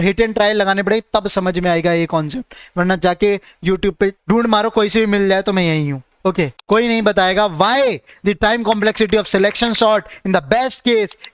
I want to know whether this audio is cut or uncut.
cut